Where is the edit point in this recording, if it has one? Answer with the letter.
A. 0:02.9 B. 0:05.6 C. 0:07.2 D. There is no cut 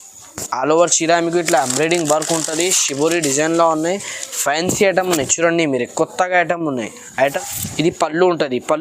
C